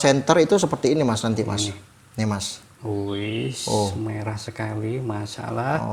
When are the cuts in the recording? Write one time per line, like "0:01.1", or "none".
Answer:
none